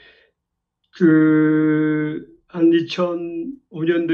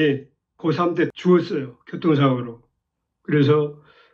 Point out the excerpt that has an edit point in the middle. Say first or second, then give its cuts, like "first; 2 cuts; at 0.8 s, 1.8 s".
second; 1 cut; at 1.2 s